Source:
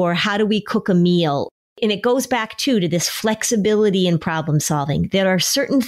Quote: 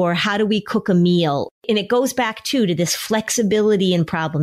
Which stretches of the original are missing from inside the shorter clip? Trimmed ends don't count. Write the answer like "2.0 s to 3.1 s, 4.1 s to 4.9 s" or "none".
1.5 s to 1.7 s